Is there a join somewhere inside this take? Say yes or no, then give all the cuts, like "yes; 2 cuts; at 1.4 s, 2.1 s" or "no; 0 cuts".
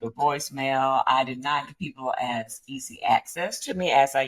no; 0 cuts